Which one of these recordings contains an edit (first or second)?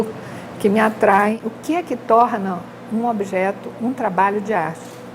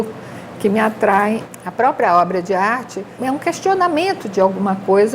second